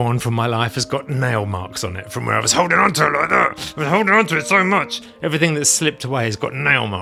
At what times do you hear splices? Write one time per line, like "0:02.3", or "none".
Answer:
none